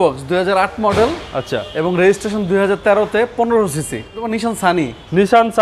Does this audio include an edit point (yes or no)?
yes